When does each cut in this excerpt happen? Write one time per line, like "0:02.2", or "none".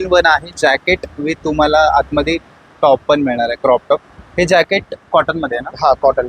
none